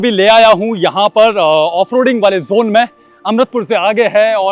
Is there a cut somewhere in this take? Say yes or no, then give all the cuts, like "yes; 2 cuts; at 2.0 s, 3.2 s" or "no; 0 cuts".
no; 0 cuts